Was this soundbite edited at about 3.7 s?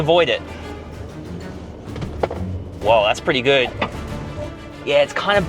yes; 1 cut; at 3.7 s

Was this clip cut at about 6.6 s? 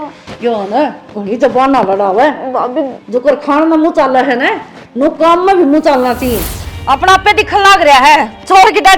yes; 1 cut; at 6.6 s

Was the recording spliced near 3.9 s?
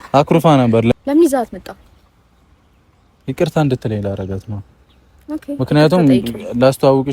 no; 1 cut; at 0.9 s

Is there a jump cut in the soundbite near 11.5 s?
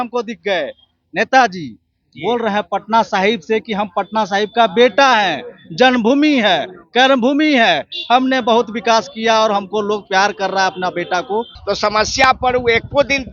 yes; 1 cut; at 11.5 s

